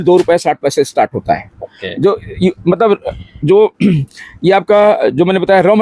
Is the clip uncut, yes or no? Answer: yes